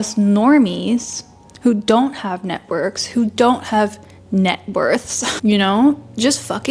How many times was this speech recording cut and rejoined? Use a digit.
0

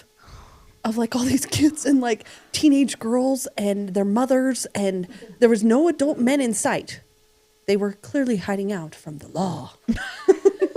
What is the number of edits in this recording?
0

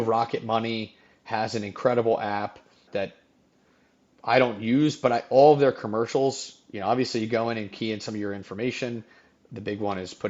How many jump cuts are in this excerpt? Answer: 0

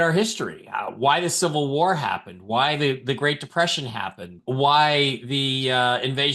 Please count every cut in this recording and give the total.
1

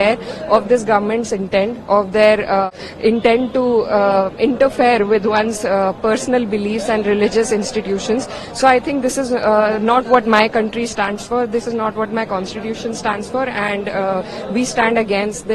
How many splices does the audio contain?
1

